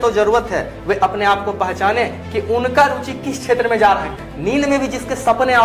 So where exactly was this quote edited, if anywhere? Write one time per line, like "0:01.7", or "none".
0:04.2